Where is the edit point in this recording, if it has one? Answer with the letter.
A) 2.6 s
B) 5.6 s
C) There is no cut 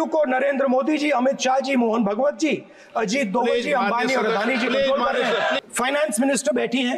B